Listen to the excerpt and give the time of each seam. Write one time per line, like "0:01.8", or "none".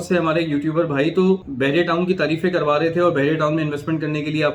0:01.5